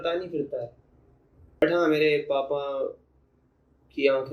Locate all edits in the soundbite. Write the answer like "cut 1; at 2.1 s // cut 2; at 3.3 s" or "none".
cut 1; at 1.6 s